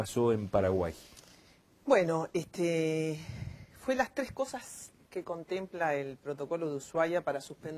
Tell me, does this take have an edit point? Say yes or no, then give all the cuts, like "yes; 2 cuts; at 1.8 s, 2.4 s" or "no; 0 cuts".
no; 0 cuts